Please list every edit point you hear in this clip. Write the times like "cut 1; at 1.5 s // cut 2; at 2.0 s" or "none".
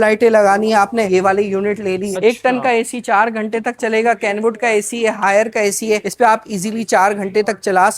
cut 1; at 2.1 s